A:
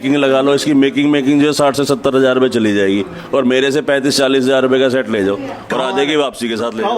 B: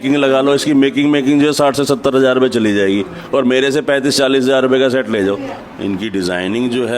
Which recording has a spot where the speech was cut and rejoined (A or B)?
B